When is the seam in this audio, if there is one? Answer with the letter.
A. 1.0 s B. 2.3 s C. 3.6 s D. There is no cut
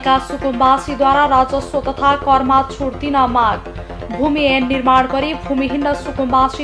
D